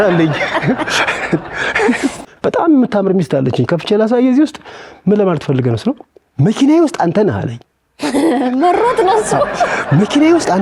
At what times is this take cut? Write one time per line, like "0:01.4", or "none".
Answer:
0:02.3